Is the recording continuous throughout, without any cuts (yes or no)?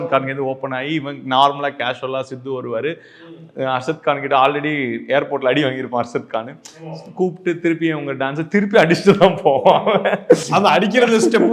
yes